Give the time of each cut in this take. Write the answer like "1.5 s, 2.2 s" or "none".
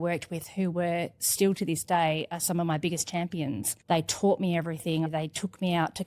5.1 s